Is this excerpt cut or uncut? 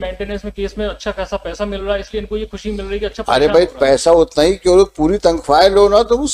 uncut